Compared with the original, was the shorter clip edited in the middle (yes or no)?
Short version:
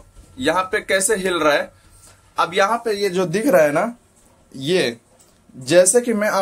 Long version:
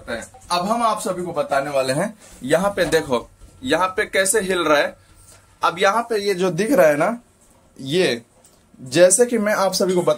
no